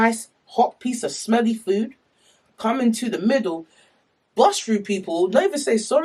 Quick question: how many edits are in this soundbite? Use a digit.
0